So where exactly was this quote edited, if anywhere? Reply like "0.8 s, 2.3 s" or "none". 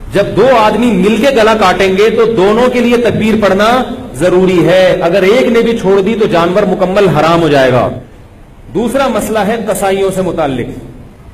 7.9 s